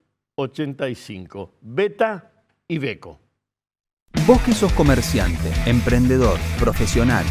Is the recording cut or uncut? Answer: cut